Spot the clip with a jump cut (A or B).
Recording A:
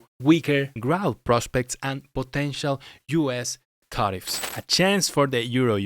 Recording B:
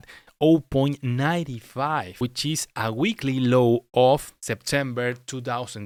A